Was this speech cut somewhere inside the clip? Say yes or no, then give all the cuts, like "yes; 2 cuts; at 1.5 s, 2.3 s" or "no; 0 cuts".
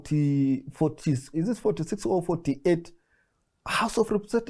no; 0 cuts